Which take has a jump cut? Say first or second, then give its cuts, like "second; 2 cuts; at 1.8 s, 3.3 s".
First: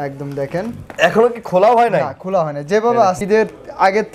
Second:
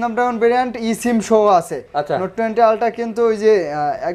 first; 1 cut; at 3.2 s